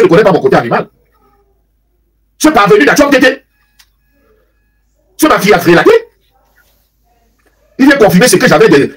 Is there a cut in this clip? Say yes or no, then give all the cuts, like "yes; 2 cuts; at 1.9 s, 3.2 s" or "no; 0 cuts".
no; 0 cuts